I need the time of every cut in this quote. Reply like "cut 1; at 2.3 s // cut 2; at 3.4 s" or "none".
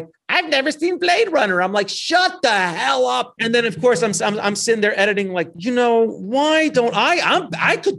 cut 1; at 3.3 s // cut 2; at 5.5 s